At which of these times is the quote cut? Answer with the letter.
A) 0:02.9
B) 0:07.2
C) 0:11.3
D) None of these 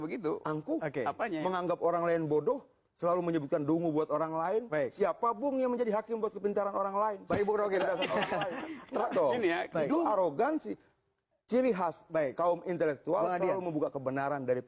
D